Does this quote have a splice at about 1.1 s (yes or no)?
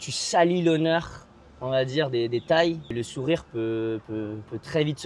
no